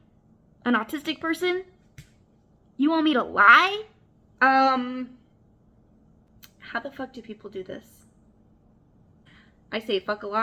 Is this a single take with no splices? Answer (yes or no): no